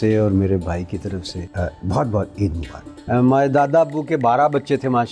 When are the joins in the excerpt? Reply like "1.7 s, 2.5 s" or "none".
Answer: 1.4 s, 3.1 s